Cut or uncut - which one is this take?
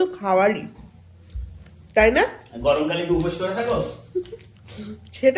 uncut